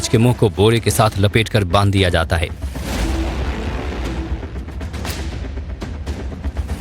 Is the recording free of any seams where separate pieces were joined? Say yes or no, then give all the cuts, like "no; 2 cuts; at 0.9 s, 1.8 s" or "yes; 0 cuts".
no; 1 cut; at 2.1 s